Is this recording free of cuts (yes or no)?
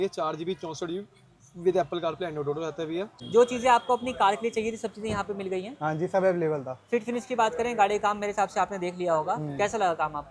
no